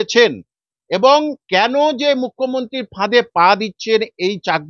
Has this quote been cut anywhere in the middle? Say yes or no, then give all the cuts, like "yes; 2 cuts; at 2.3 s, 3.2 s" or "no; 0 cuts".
no; 0 cuts